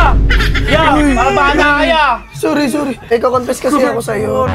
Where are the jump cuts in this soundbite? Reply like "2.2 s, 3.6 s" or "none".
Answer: 3.0 s